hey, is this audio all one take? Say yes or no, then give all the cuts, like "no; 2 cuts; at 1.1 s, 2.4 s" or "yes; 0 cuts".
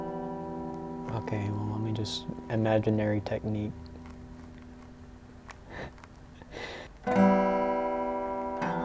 no; 1 cut; at 6.9 s